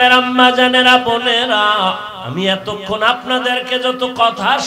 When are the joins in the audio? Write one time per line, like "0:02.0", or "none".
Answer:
0:02.1